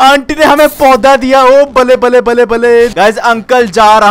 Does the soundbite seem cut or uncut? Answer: cut